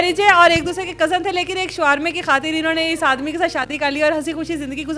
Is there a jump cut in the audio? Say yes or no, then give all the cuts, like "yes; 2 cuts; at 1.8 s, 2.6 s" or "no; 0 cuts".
no; 0 cuts